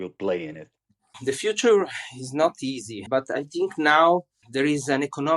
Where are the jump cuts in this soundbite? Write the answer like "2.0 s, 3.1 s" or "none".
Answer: 2.9 s

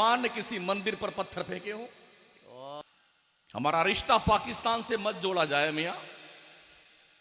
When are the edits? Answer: 2.8 s

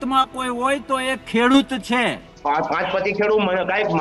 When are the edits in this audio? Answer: 2.3 s

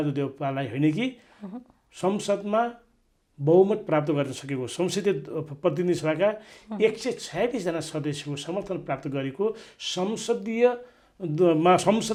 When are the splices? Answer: none

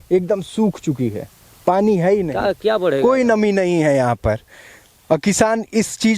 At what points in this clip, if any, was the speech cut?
none

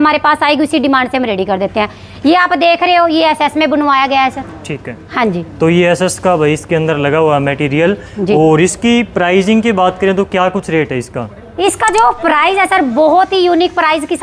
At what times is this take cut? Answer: none

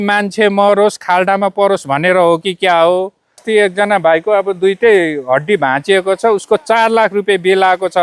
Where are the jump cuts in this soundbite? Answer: 3.4 s

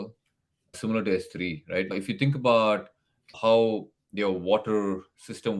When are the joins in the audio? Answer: 0.8 s, 1.9 s, 3.3 s

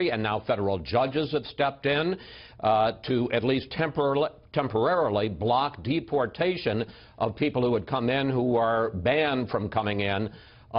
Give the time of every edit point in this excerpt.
8.0 s

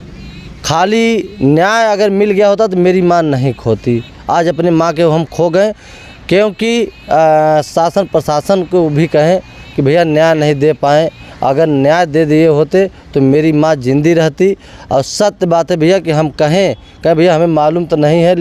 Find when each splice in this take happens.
none

